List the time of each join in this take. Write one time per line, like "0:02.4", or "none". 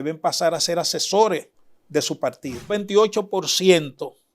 0:02.7